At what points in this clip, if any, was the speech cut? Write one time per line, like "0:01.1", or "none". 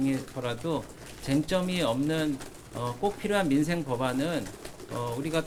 none